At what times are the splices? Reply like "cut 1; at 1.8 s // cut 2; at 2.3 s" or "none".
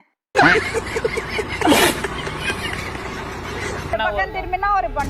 cut 1; at 3.9 s